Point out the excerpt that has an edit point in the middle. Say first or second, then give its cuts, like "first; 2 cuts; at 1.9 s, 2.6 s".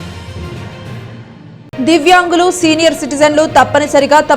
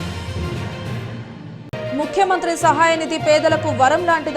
first; 1 cut; at 1.1 s